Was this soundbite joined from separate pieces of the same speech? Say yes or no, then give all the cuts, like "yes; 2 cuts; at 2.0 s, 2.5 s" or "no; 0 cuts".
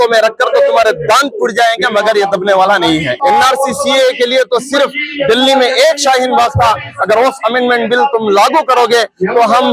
yes; 1 cut; at 3.1 s